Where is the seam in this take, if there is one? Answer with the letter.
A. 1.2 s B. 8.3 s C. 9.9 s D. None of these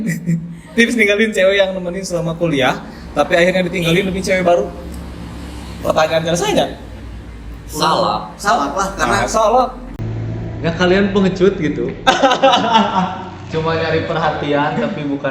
C